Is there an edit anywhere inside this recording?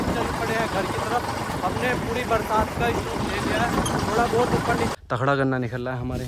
yes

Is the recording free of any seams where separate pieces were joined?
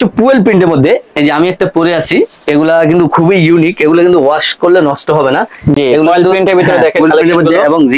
yes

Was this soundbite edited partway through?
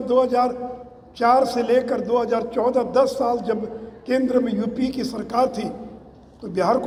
no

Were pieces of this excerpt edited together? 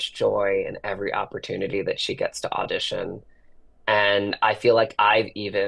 no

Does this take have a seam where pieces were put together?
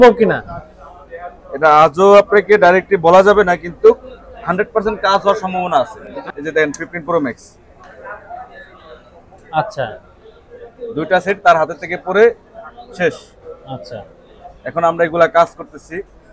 yes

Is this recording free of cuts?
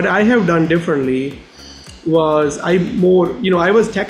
yes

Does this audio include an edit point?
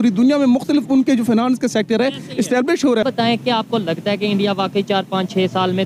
yes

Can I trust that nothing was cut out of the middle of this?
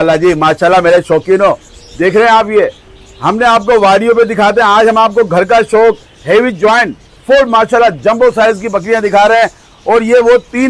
yes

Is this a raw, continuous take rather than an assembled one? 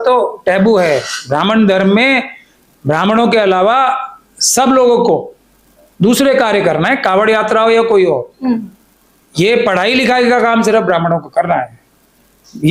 yes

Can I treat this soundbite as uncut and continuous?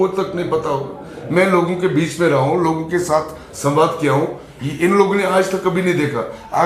yes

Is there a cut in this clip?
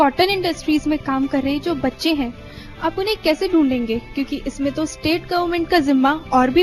no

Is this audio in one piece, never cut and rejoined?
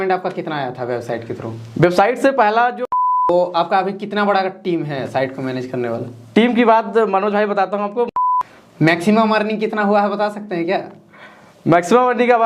no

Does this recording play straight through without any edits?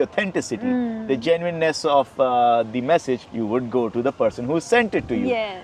yes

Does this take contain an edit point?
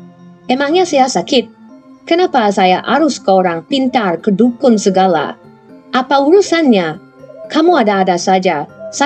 no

